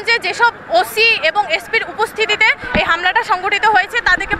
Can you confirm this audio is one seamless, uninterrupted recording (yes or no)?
yes